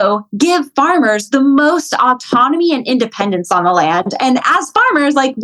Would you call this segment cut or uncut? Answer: uncut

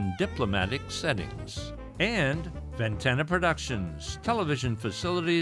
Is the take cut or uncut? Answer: uncut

